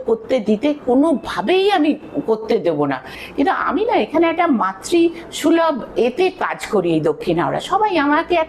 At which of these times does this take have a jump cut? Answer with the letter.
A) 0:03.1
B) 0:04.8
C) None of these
A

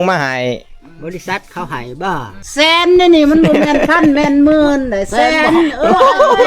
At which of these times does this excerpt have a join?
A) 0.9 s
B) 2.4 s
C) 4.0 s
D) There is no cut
B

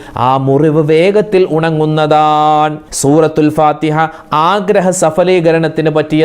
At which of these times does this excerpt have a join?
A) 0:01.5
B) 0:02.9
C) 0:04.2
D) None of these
B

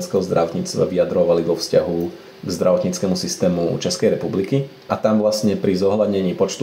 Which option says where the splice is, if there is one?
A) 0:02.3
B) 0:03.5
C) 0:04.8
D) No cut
C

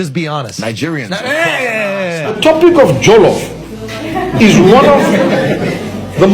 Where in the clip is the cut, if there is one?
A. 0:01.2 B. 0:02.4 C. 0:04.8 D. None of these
B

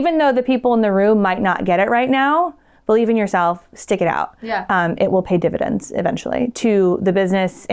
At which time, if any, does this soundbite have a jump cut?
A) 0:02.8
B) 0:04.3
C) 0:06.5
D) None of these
D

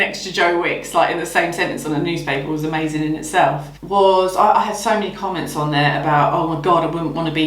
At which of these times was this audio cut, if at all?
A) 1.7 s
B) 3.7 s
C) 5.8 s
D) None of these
B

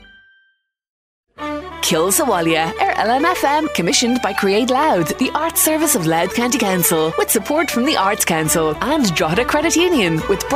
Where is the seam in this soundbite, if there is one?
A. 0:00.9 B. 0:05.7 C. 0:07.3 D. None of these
A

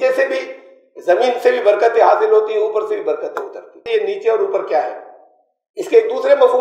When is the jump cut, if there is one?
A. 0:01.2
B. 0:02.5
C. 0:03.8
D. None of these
C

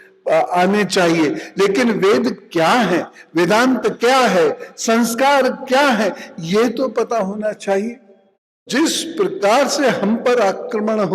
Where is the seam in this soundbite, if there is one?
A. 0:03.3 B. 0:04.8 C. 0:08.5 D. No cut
C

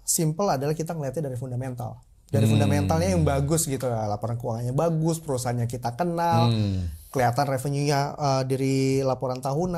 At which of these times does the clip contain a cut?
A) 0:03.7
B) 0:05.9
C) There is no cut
C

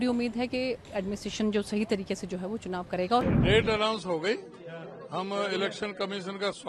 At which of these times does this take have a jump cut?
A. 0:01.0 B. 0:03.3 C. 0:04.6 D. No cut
B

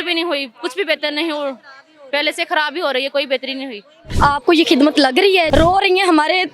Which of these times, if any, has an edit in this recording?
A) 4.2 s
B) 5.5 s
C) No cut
B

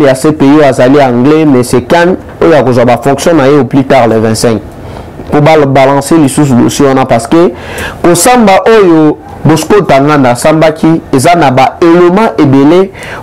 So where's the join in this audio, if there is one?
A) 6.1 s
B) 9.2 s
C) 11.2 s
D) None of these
D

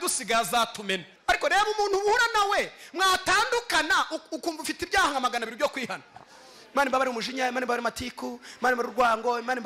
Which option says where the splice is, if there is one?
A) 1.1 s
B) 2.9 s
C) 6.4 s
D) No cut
A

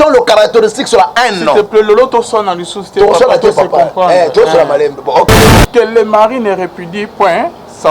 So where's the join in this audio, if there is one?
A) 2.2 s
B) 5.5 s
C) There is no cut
B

